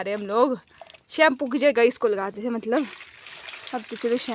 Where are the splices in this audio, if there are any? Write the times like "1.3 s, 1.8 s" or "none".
none